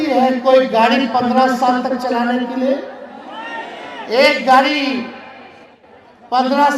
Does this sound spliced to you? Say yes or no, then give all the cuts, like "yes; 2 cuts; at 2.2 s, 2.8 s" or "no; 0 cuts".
no; 0 cuts